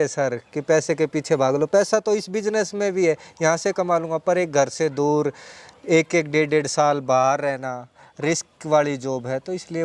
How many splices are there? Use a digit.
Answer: 0